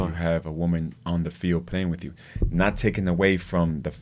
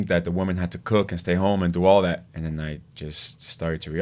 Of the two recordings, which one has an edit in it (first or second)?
second